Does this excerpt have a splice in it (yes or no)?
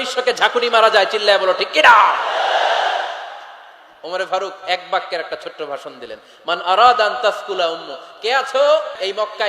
no